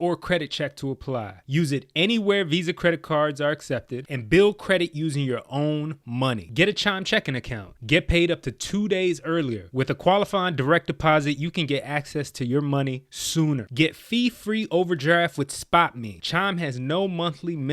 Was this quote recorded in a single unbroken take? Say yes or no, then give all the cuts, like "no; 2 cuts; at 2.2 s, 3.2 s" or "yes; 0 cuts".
no; 1 cut; at 16.1 s